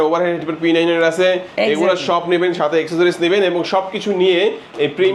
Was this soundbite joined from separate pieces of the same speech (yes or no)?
no